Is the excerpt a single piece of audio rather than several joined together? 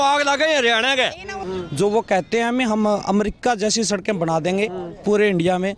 no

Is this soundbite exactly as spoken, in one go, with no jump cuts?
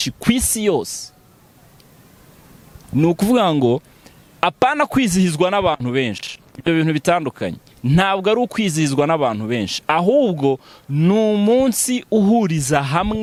yes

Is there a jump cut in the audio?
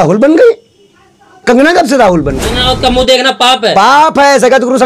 yes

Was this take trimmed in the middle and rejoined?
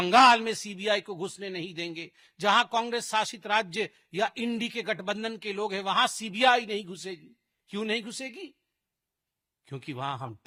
no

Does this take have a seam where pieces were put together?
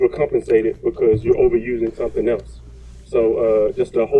yes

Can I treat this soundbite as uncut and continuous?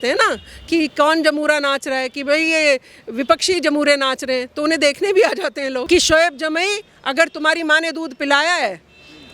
no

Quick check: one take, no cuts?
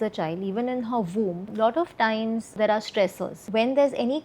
no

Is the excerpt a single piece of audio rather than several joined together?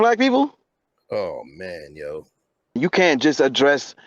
no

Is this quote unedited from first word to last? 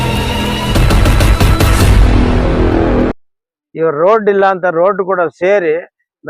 no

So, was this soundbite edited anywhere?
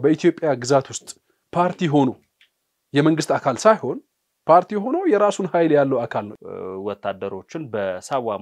yes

